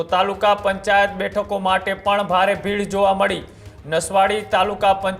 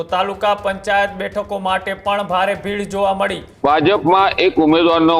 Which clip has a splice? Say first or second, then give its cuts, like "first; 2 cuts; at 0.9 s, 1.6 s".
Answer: second; 1 cut; at 3.5 s